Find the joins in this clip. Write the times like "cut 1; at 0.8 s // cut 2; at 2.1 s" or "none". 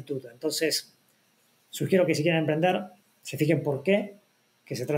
none